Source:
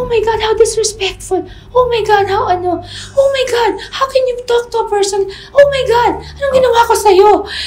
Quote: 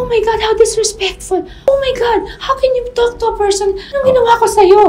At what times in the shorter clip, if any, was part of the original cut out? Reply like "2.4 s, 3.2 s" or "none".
1.5 s, 3.9 s